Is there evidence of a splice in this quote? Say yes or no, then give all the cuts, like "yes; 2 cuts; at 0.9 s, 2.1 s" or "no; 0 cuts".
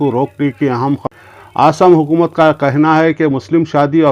yes; 1 cut; at 1.1 s